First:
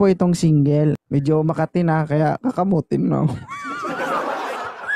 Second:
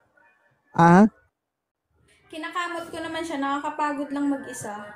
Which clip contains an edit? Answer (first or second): first